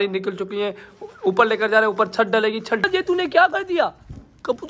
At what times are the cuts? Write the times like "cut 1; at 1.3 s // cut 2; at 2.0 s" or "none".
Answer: cut 1; at 2.8 s

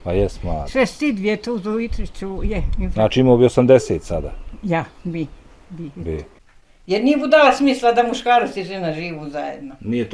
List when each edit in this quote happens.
cut 1; at 6.4 s

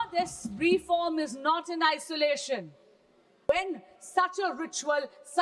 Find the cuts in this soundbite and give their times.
cut 1; at 3.5 s

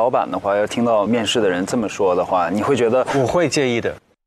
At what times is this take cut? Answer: none

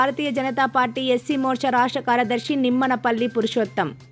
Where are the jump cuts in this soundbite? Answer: none

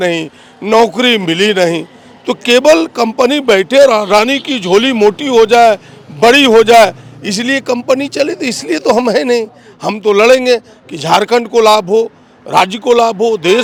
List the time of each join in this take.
none

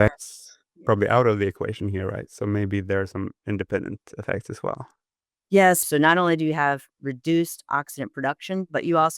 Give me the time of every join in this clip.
cut 1; at 5.8 s

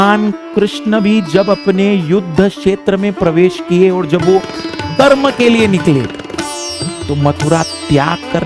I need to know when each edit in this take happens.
none

